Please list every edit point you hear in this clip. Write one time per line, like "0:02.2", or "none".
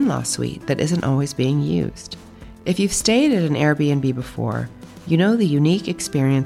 none